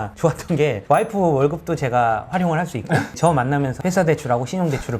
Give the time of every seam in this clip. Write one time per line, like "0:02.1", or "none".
0:03.1